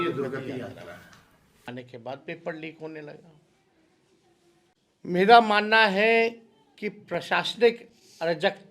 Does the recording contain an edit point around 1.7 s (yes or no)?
yes